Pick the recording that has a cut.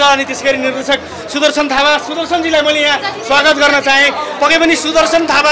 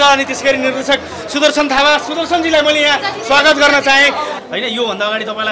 second; 1 cut; at 4.3 s

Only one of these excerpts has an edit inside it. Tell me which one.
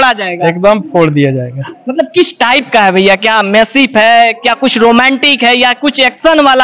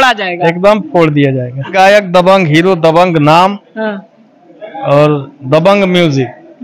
second; 1 cut; at 1.7 s

